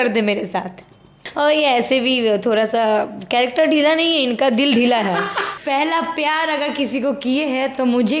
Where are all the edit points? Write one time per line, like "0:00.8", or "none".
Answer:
0:01.2
0:05.5